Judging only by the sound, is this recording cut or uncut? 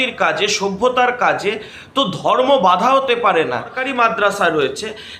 cut